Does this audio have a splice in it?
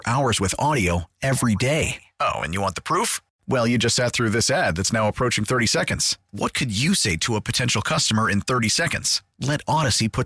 no; 0 cuts

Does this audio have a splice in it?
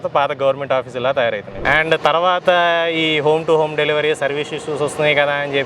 yes; 1 cut; at 1.5 s

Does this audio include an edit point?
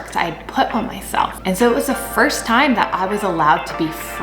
yes; 1 cut; at 1.4 s

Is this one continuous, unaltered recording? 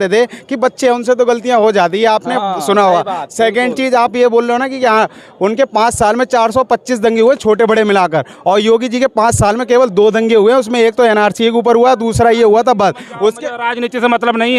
yes; 0 cuts

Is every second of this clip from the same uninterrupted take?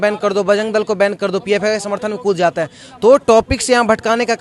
yes; 0 cuts

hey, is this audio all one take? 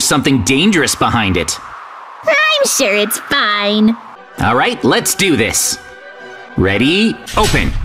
no; 1 cut; at 4.1 s

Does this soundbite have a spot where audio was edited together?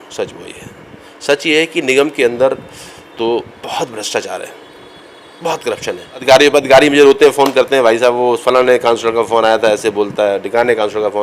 yes; 1 cut; at 6.1 s

